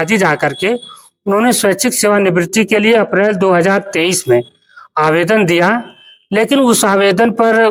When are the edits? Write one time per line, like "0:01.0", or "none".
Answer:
none